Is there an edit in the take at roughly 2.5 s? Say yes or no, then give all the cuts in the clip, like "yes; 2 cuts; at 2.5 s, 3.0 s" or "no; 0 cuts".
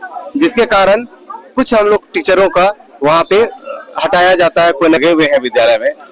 no; 1 cut; at 5.0 s